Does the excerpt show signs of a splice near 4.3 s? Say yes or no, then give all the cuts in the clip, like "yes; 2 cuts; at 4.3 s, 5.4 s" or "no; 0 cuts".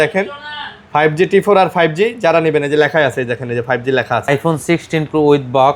yes; 1 cut; at 4.3 s